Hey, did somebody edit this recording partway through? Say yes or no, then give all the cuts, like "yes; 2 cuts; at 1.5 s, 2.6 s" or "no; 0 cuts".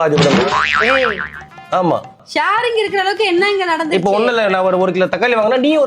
yes; 1 cut; at 2.2 s